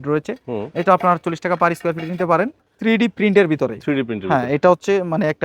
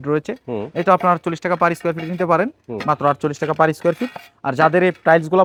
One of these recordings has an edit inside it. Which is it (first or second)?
first